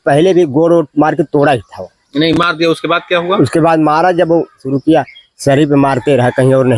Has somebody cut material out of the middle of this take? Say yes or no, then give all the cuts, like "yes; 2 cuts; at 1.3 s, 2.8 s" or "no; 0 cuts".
yes; 1 cut; at 4.7 s